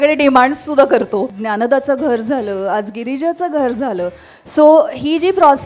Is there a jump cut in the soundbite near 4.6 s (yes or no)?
no